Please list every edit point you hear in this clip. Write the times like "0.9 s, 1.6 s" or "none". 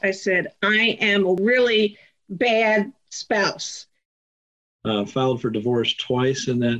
1.4 s, 4.1 s